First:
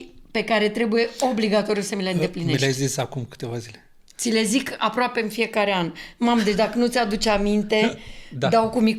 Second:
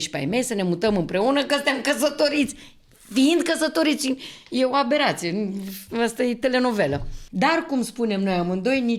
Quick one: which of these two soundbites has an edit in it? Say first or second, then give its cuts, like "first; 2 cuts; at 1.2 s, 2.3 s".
second; 1 cut; at 7.2 s